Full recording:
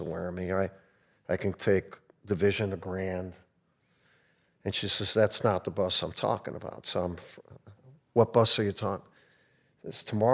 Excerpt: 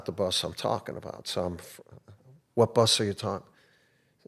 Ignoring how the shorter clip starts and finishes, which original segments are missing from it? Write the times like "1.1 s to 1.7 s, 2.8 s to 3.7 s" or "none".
none